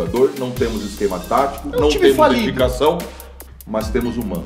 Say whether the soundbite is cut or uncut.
uncut